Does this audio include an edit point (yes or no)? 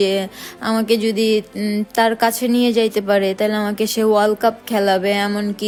no